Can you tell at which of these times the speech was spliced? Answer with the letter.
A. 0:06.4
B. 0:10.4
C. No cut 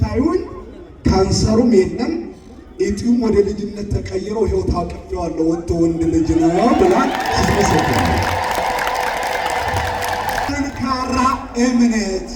B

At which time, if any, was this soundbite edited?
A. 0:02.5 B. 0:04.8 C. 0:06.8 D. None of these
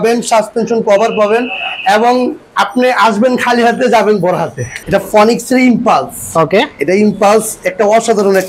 B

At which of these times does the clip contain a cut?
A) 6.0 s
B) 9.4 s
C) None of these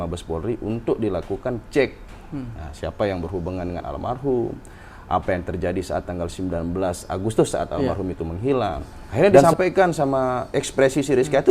B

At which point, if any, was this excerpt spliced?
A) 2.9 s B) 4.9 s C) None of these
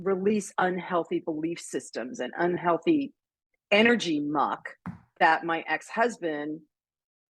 C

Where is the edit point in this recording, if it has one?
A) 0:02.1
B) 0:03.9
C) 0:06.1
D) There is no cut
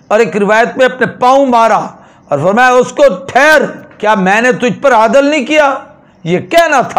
B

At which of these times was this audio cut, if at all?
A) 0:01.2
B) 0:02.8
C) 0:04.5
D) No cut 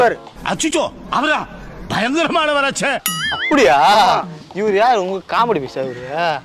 D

